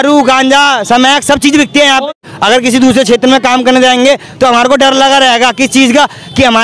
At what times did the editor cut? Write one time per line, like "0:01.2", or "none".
0:02.1